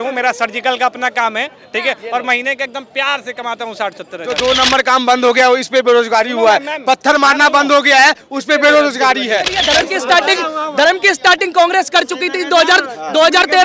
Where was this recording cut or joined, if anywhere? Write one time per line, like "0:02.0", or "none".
0:04.2
0:09.6

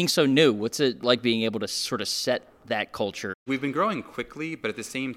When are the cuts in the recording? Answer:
0:01.0
0:03.4

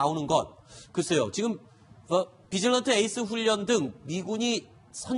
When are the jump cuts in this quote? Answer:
none

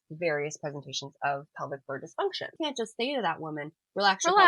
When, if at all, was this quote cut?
0:02.5

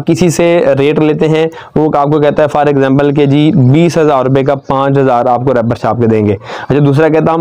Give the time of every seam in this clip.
none

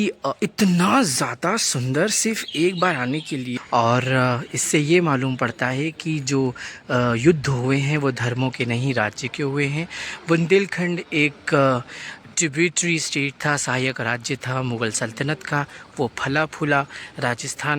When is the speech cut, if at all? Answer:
0:03.6

